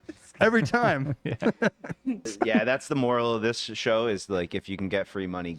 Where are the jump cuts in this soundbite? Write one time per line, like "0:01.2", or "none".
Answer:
0:02.3